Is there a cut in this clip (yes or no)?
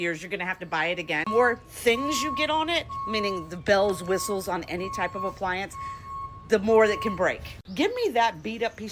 yes